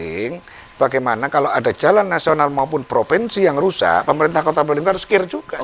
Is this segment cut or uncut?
uncut